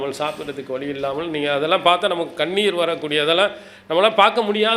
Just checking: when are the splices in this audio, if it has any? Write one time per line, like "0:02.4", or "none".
none